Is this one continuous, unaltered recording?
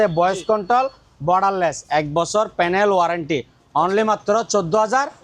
yes; 0 cuts

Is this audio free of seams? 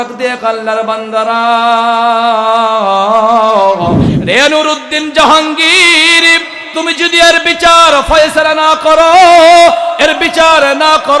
no; 1 cut; at 4.1 s

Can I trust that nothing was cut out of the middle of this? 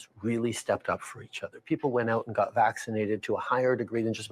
no; 1 cut; at 1.1 s

